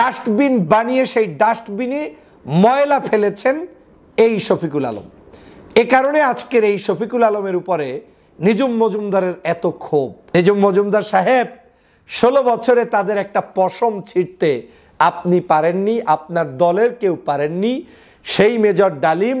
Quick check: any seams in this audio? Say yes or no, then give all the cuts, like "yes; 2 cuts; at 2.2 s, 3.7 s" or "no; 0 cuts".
yes; 1 cut; at 10.2 s